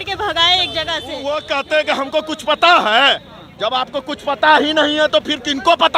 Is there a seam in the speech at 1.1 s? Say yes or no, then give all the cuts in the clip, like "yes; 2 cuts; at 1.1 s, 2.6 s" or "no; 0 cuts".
yes; 1 cut; at 1.1 s